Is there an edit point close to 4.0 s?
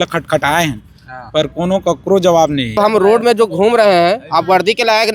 no; 1 cut; at 2.8 s

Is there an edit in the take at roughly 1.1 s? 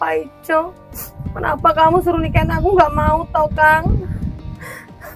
no; 0 cuts

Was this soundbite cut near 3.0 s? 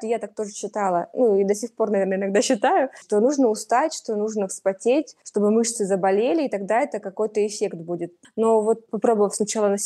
yes; 4 cuts; at 3.0 s, 5.2 s, 8.2 s, 8.9 s

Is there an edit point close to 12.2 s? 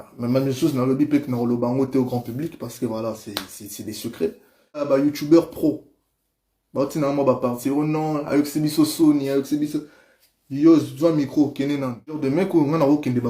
yes; 2 cuts; at 4.9 s, 12.2 s

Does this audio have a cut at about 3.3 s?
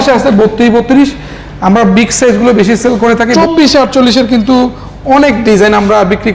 yes; 1 cut; at 3.3 s

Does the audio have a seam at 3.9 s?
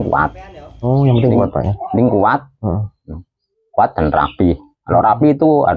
no; 0 cuts

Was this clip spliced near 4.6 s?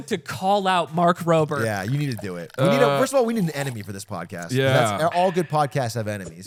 no; 0 cuts

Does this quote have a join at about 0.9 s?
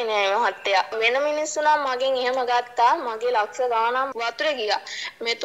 yes; 1 cut; at 0.9 s

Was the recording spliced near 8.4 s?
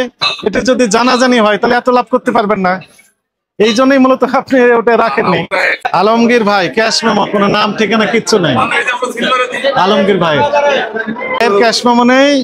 no; 2 cuts; at 5.8 s, 11.4 s

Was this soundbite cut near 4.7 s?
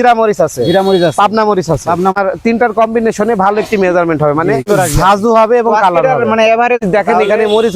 yes; 3 cuts; at 2.1 s, 4.7 s, 6.8 s

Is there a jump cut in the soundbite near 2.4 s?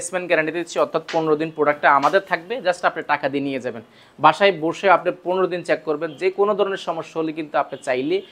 no; 0 cuts

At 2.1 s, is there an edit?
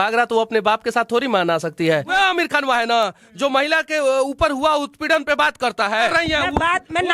yes; 2 cuts; at 2.1 s, 6.1 s

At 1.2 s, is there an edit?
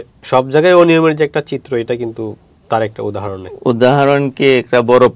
no; 1 cut; at 2.5 s

